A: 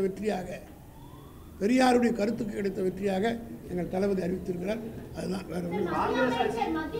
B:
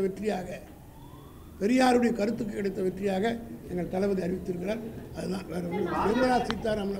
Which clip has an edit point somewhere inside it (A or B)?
B